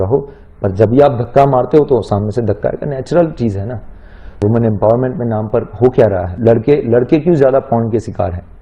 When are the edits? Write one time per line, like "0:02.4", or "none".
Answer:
0:04.3
0:06.3